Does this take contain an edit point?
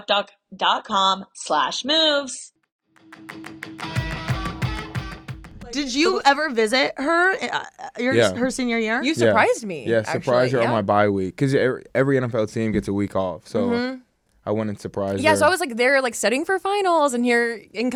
no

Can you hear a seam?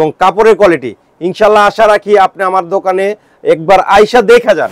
no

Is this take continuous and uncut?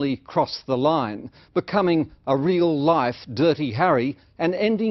yes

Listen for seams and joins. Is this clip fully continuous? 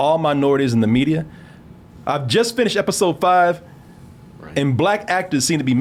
no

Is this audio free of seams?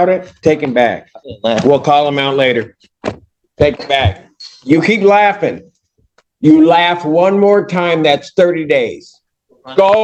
yes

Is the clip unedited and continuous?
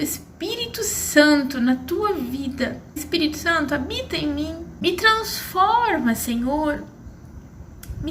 no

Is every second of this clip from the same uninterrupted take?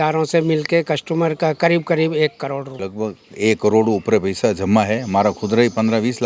no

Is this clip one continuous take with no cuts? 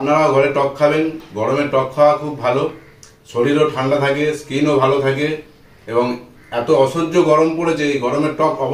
yes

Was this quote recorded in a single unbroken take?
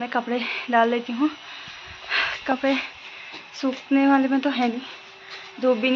yes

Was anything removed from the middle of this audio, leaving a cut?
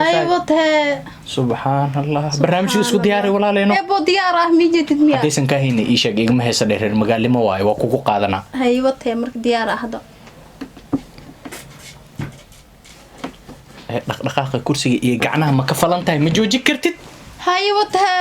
yes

